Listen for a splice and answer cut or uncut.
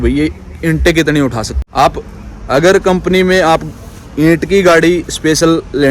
cut